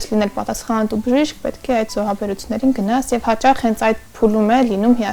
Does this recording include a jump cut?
no; 0 cuts

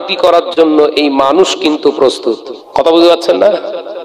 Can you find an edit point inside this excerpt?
yes; 1 cut; at 2.5 s

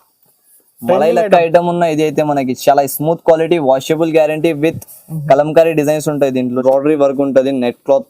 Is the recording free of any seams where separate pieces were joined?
no; 1 cut; at 6.6 s

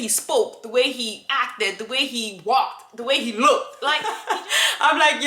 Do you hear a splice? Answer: yes; 1 cut; at 4.1 s

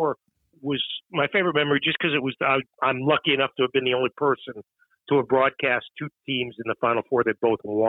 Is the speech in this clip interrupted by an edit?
no; 0 cuts

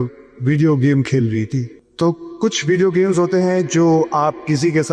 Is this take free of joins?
no; 1 cut; at 1.9 s

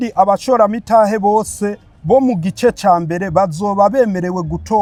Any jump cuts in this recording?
no; 0 cuts

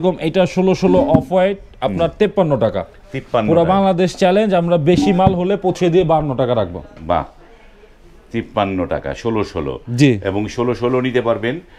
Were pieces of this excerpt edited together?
no; 0 cuts

